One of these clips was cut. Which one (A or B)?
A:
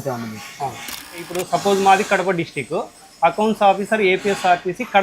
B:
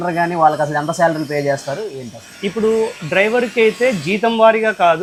A